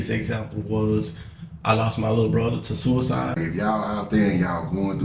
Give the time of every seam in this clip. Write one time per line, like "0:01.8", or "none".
0:03.4